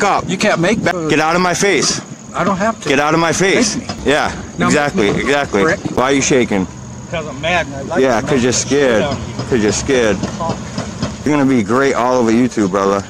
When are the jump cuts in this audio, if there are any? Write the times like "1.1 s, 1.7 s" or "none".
0.9 s, 3.9 s, 6.0 s, 11.3 s